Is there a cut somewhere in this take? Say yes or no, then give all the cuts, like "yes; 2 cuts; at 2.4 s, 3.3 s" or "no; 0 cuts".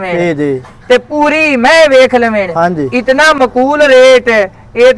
no; 0 cuts